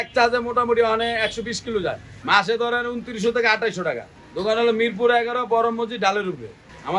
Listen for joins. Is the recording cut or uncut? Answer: uncut